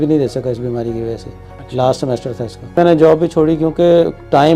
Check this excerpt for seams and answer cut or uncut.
uncut